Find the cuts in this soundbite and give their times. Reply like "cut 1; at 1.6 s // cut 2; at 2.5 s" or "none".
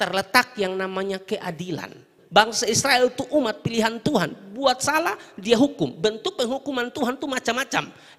cut 1; at 2.1 s